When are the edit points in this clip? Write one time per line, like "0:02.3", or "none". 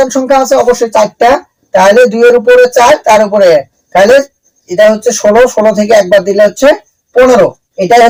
none